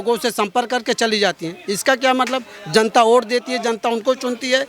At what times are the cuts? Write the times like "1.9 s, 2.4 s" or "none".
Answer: none